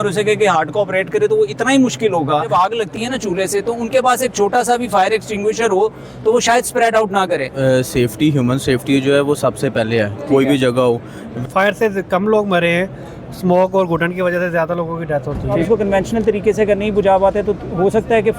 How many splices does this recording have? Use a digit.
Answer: 4